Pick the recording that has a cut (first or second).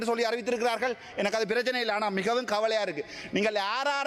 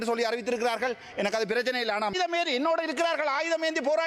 second